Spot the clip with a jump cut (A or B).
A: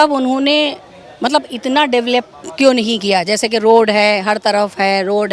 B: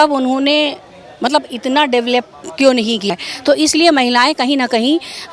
B